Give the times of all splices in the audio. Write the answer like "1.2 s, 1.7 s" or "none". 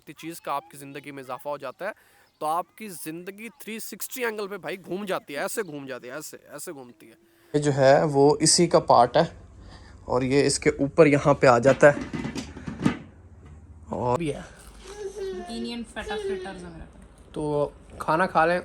7.5 s, 14.2 s